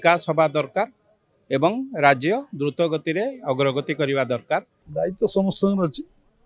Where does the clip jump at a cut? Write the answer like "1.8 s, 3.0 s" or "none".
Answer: 4.8 s

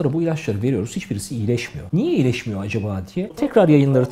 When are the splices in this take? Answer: 1.8 s, 3.3 s

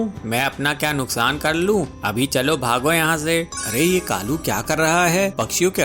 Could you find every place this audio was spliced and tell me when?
3.6 s

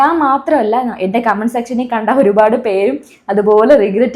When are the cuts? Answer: none

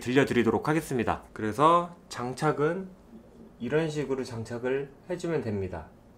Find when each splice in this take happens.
1.3 s

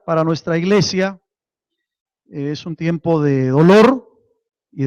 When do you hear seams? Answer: none

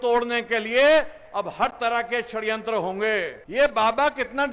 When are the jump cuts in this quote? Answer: 3.4 s

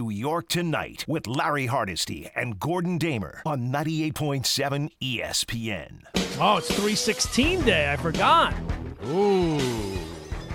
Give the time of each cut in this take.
6.0 s

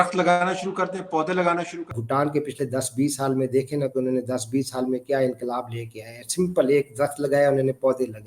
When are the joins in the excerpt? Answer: 2.0 s

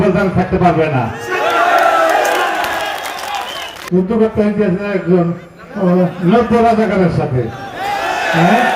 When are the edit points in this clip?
3.8 s

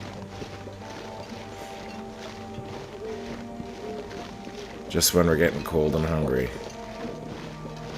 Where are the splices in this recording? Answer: 4.9 s, 6.5 s

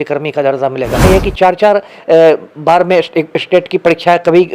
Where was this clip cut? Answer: 1.1 s

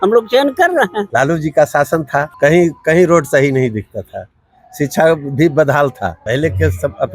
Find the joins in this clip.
1.1 s, 2.3 s, 6.2 s

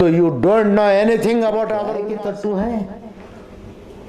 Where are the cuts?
1.9 s

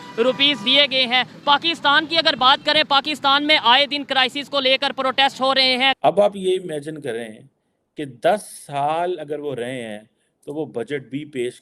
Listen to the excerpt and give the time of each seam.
6.0 s

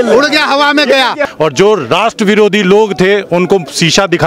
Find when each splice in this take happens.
1.2 s

